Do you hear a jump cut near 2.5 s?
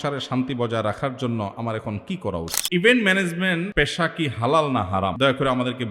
yes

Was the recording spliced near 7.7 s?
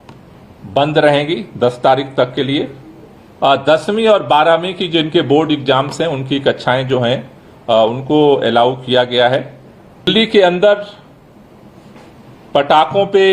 no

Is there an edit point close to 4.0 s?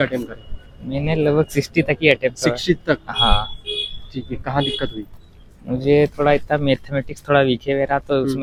no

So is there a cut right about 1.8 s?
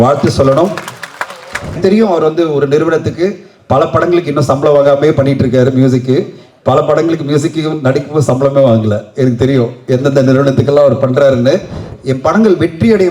yes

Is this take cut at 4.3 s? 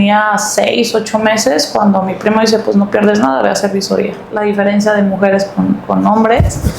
yes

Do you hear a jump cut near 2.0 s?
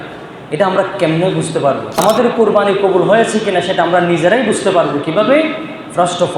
yes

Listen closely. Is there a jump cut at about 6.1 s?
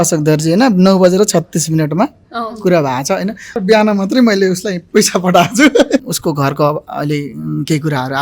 yes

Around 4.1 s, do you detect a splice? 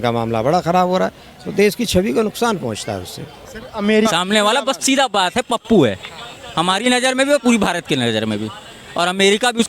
yes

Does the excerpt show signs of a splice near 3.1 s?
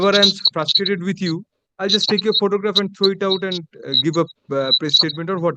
no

